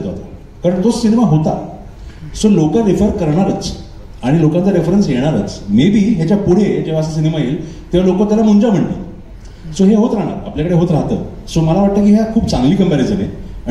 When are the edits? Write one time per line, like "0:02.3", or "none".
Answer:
none